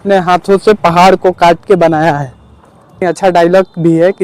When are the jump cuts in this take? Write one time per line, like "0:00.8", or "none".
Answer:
0:03.0